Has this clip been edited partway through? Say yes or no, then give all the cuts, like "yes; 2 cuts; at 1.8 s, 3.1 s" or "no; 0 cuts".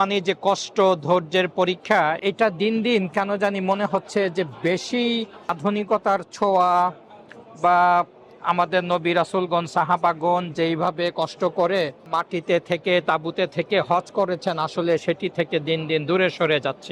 yes; 3 cuts; at 2.2 s, 5.6 s, 12.0 s